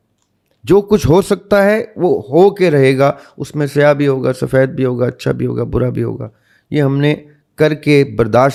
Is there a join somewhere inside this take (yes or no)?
no